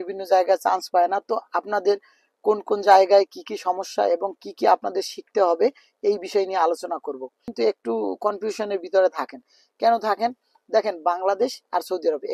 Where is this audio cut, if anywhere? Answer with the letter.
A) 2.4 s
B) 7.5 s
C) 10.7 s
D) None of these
B